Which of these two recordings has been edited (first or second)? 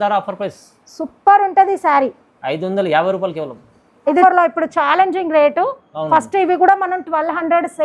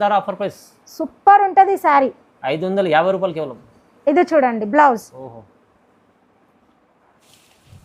first